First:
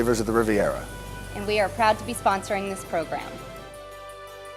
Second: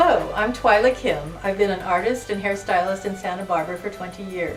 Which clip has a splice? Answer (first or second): first